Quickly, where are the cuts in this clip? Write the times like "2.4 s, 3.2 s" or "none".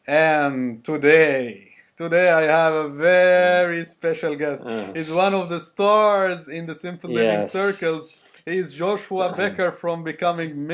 9.2 s